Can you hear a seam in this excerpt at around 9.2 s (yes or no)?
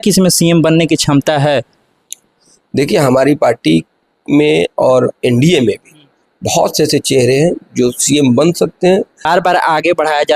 yes